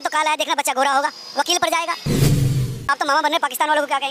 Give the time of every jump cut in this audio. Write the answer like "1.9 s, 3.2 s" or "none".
2.4 s